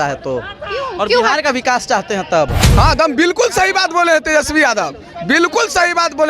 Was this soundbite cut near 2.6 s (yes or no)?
yes